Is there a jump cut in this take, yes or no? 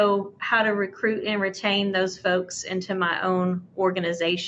no